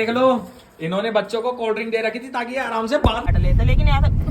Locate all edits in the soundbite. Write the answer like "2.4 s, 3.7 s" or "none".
3.3 s